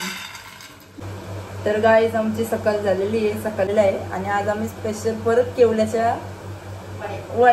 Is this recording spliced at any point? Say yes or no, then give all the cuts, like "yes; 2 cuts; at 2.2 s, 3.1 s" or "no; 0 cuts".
yes; 2 cuts; at 1.0 s, 3.7 s